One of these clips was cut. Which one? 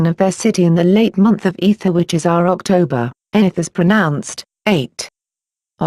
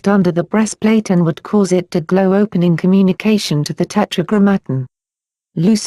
second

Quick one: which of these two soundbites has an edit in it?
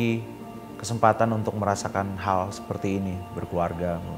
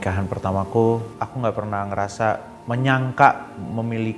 second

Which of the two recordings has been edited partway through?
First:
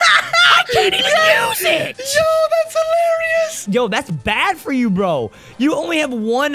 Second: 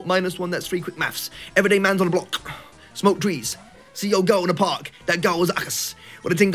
first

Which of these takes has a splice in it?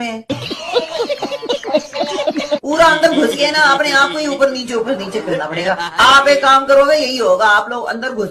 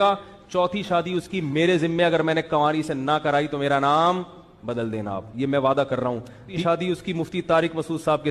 second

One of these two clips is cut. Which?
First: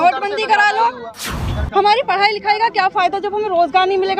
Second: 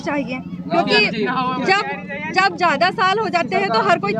first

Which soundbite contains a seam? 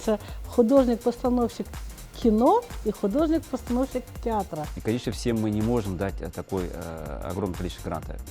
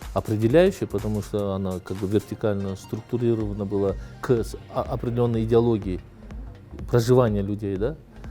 first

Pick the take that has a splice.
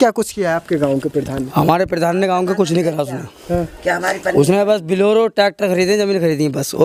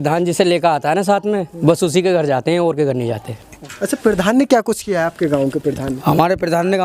second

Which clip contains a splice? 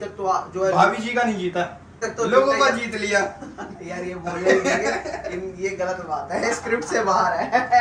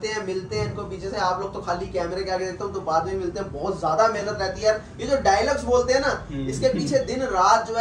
first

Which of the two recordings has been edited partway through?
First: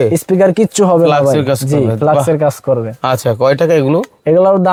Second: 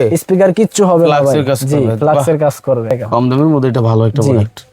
second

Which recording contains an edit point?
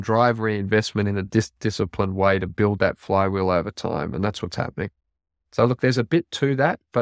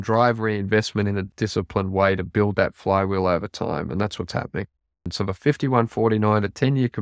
second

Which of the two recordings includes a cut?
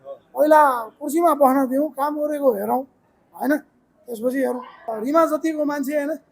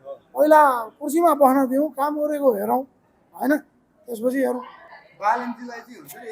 first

